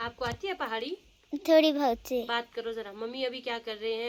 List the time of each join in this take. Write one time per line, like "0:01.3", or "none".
none